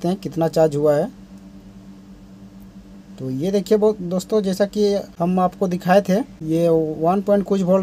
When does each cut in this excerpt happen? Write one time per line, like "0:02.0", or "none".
0:05.1
0:06.4

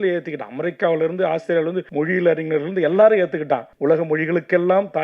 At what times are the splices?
0:01.8
0:03.7

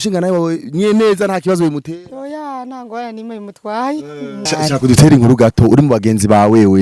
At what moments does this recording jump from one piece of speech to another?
0:04.4

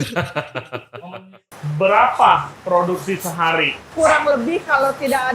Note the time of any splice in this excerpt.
0:01.1
0:02.5
0:03.9

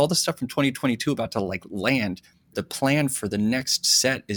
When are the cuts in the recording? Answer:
0:02.5

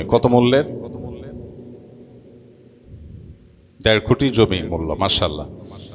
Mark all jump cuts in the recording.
none

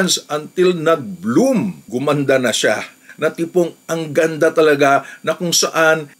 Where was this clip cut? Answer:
0:01.8
0:03.0

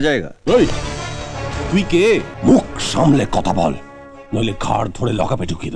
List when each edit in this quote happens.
0:02.3

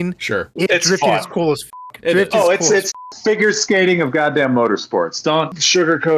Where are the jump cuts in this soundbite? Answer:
0:05.3

